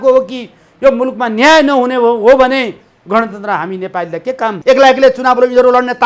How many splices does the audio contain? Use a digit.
1